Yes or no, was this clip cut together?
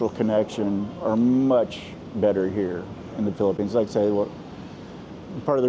no